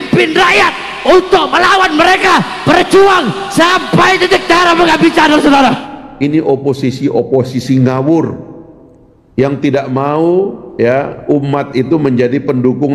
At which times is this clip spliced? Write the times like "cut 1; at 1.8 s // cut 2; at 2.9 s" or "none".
cut 1; at 5.8 s